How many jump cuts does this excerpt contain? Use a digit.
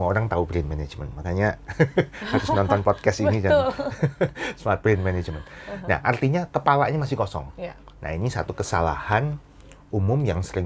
0